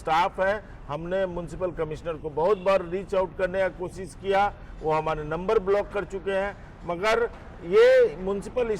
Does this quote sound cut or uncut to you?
uncut